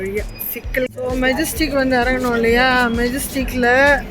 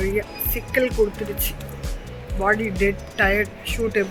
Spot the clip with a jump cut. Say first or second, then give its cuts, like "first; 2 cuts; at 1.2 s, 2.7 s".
first; 1 cut; at 0.9 s